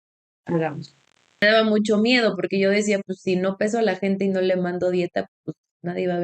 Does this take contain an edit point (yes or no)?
yes